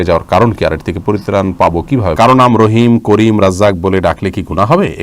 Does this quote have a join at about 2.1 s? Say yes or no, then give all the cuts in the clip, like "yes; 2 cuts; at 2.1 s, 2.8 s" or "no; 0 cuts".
yes; 1 cut; at 2.1 s